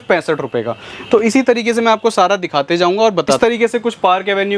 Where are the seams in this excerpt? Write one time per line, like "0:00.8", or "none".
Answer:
0:03.4